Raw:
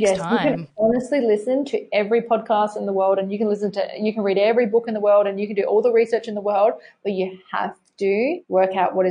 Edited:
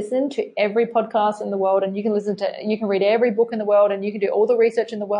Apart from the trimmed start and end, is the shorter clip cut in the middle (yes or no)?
no